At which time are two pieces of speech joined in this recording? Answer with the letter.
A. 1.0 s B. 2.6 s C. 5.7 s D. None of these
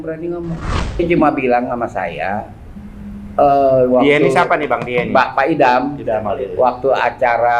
A